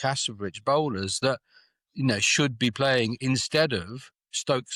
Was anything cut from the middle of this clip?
no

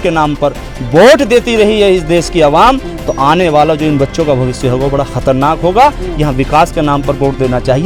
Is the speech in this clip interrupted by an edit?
no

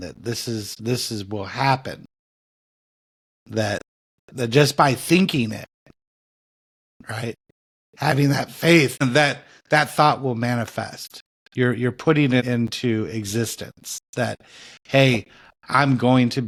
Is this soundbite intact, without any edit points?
yes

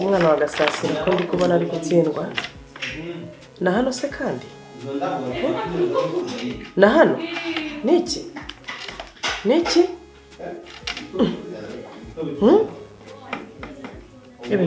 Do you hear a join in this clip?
no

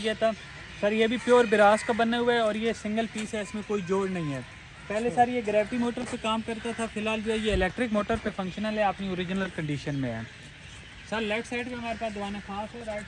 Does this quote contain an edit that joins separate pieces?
no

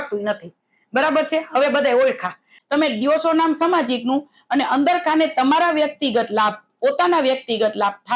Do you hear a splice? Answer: yes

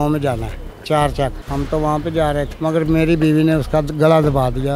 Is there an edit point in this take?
yes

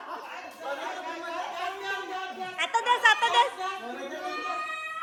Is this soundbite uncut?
yes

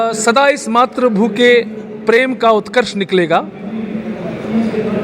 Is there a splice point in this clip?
no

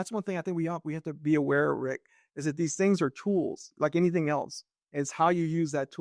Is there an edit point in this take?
no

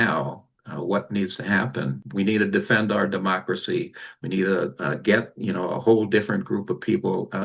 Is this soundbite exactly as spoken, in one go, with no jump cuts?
no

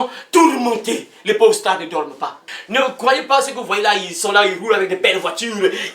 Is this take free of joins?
no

